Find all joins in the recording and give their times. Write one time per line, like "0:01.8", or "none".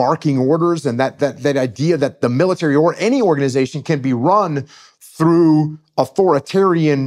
none